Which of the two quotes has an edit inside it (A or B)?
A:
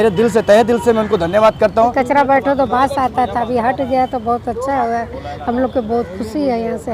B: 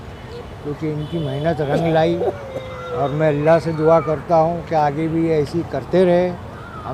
A